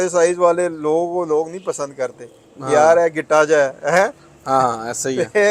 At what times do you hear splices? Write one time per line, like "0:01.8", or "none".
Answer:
none